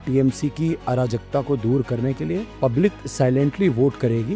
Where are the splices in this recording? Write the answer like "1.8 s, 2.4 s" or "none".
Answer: 2.5 s